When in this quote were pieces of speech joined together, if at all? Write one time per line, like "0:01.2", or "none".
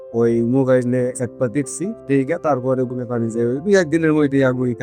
none